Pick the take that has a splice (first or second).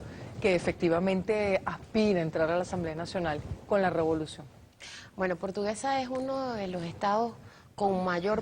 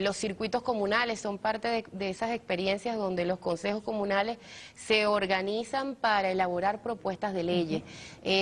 first